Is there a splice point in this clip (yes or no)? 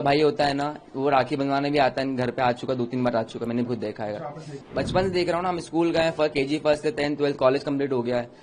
yes